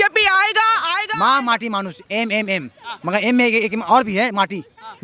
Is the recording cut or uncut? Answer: cut